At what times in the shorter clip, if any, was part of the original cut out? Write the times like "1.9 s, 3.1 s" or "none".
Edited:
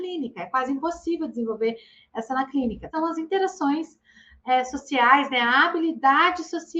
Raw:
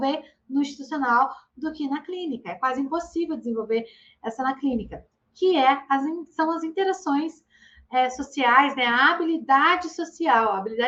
2.9 s

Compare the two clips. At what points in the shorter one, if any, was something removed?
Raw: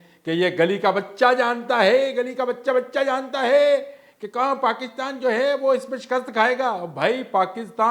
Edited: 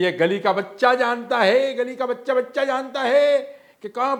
none

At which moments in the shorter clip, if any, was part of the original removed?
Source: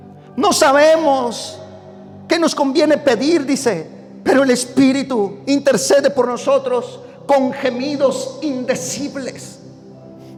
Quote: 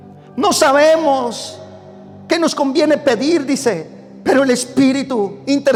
none

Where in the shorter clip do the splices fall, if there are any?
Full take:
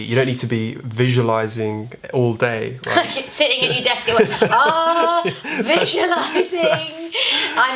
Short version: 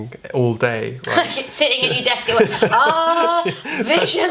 none

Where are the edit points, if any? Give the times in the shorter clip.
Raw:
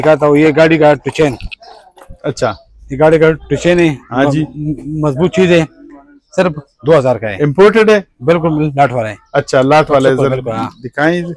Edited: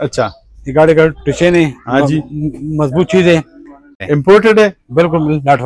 4.0 s

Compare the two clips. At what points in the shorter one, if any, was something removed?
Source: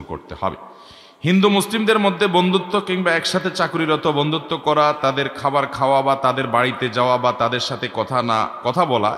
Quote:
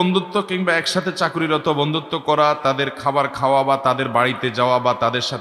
none

